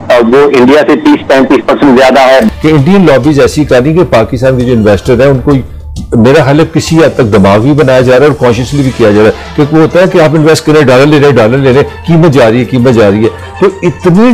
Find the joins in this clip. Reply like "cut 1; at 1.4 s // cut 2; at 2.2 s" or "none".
cut 1; at 2.5 s